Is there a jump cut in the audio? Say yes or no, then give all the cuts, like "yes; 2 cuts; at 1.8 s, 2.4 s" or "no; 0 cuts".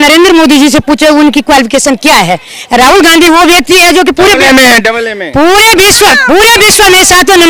no; 0 cuts